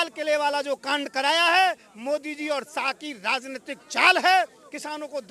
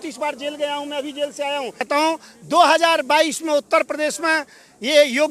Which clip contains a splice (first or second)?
second